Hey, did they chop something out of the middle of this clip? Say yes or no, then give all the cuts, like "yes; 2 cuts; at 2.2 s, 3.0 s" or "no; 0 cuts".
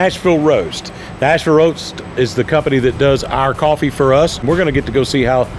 yes; 1 cut; at 4.4 s